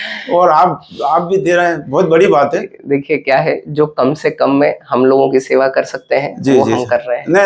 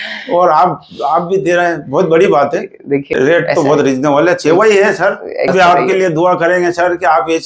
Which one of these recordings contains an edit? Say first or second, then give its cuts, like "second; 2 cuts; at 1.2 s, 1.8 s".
second; 2 cuts; at 2.9 s, 5.5 s